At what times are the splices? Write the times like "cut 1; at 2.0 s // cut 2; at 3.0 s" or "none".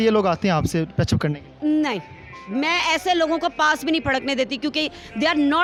none